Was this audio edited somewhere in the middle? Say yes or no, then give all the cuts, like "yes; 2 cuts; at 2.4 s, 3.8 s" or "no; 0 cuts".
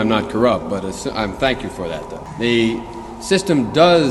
yes; 1 cut; at 2.2 s